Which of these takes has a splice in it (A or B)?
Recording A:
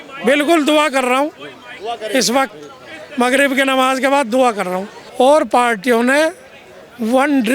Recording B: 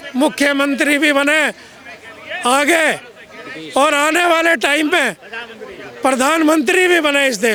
A